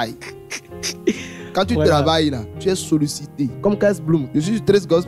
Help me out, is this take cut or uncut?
cut